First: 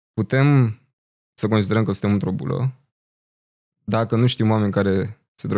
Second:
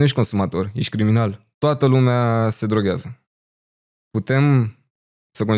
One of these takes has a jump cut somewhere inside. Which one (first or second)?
second